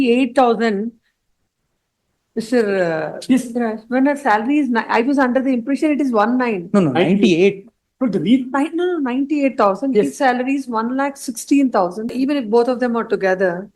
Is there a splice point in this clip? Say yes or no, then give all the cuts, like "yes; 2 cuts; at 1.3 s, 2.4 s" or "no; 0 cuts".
yes; 1 cut; at 12.1 s